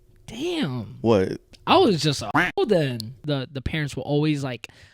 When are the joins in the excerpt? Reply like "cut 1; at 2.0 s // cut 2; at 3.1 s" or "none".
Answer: cut 1; at 3.1 s